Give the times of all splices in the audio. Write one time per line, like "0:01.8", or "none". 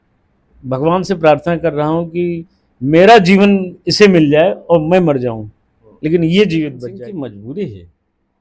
0:06.8